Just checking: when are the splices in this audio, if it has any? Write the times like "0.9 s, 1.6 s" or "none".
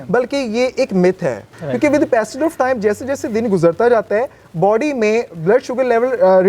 1.5 s